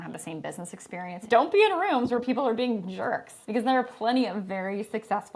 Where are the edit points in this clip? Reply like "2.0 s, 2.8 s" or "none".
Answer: 1.2 s, 3.3 s